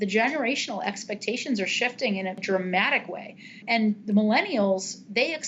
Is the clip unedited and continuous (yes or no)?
no